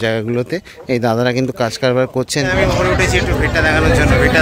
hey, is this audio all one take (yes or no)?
no